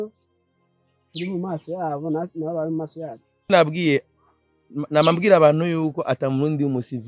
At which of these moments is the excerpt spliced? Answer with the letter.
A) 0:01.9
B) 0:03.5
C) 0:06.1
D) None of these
B